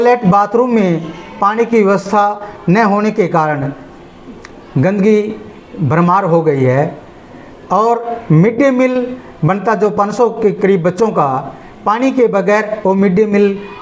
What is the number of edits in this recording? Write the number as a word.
zero